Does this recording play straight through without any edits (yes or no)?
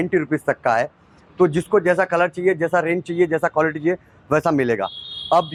yes